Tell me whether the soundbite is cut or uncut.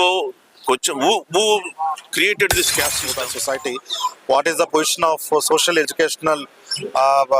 cut